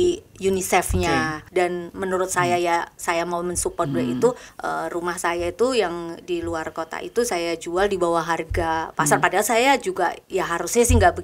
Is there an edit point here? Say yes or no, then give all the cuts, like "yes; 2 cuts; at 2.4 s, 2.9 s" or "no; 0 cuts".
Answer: yes; 2 cuts; at 1.4 s, 4.5 s